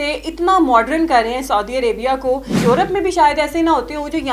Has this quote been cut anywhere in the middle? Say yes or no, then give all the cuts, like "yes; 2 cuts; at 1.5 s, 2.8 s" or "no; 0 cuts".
yes; 1 cut; at 2.6 s